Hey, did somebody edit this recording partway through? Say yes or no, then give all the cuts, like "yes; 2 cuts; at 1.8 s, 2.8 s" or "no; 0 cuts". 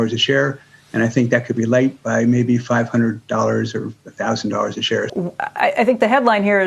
yes; 1 cut; at 5.1 s